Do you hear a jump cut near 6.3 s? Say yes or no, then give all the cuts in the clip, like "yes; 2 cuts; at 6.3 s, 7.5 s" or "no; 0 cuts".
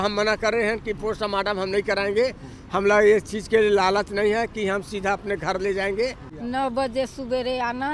yes; 1 cut; at 6.3 s